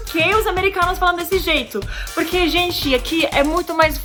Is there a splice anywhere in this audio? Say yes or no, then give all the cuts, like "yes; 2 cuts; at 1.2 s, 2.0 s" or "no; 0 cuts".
no; 0 cuts